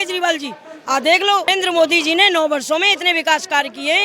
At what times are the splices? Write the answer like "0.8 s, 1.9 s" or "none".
1.5 s